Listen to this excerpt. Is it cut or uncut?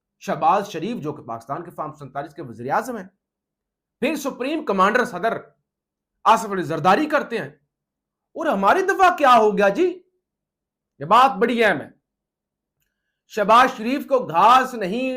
cut